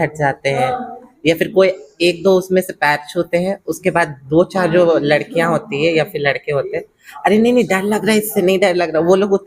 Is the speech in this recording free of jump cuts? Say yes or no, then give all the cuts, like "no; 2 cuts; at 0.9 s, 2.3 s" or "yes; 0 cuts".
yes; 0 cuts